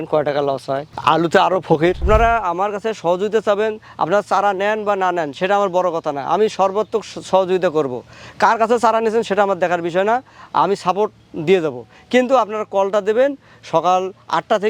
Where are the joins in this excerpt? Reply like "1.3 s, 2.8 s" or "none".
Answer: 0.9 s, 2.0 s